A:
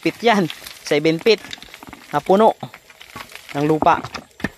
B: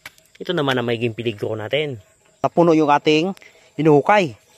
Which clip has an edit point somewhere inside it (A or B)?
B